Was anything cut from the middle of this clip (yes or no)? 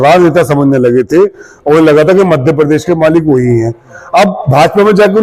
no